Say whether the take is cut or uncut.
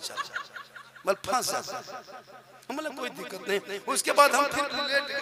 uncut